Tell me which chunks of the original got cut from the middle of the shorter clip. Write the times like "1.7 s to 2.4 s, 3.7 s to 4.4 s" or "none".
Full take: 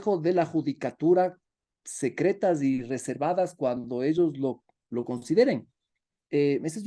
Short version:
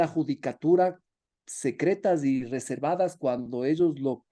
none